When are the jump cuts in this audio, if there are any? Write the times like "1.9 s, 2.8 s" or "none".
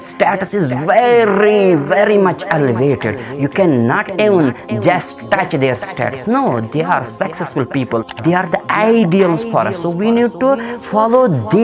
8.1 s